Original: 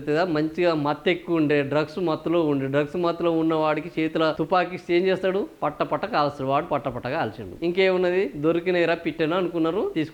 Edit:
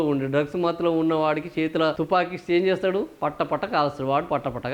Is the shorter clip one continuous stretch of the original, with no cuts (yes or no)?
yes